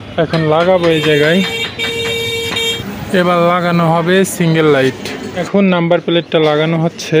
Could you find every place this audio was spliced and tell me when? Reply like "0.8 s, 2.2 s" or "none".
2.7 s, 5.3 s